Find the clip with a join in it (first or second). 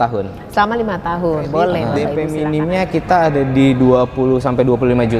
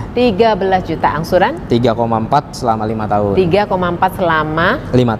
first